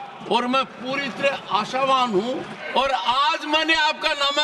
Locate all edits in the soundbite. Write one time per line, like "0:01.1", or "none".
0:02.6